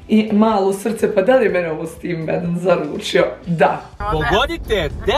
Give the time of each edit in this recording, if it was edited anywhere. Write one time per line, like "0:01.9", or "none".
0:03.9